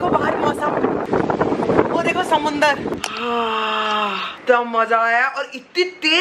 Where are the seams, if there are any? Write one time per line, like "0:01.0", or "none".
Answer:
0:01.0